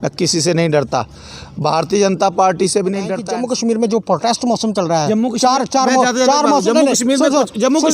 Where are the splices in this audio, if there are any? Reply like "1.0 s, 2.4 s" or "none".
3.2 s